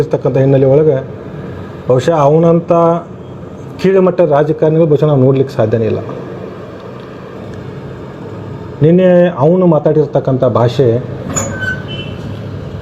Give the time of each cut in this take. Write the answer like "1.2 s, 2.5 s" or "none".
7.4 s

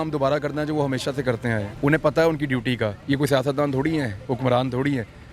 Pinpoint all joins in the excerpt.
1.7 s, 3.0 s

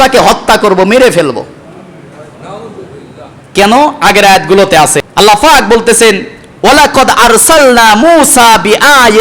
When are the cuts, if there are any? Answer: 5.0 s

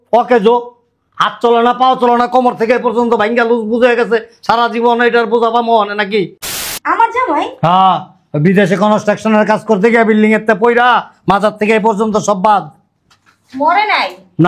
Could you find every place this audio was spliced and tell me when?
6.6 s

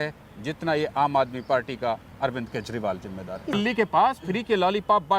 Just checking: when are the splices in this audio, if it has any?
3.6 s

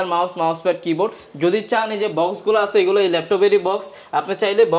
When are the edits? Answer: none

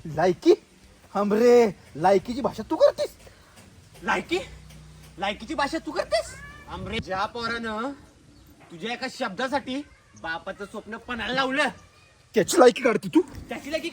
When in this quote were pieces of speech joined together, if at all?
7.0 s

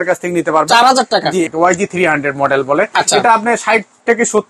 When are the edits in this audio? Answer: 1.5 s

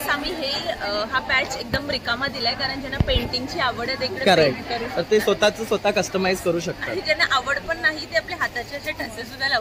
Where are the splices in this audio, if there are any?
none

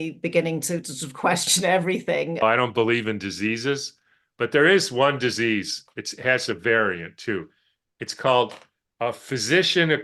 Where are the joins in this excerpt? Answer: 2.4 s

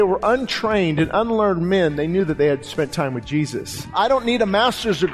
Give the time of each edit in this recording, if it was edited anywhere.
3.9 s

